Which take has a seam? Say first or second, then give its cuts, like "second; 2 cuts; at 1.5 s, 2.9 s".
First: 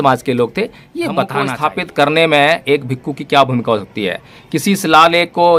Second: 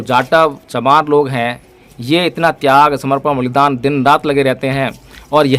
first; 1 cut; at 1.5 s